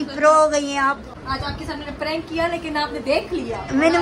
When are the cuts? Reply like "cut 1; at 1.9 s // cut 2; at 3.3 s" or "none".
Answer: cut 1; at 1.1 s